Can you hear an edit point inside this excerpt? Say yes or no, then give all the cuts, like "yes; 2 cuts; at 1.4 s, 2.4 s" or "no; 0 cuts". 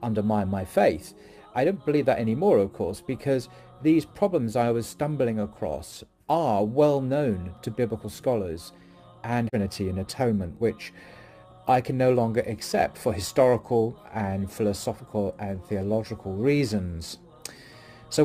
yes; 1 cut; at 9.5 s